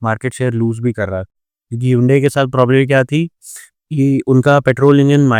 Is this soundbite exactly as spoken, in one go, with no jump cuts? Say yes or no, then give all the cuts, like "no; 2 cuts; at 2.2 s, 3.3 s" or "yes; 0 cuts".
yes; 0 cuts